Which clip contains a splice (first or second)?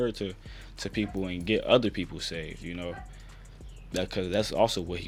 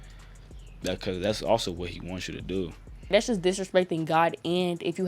second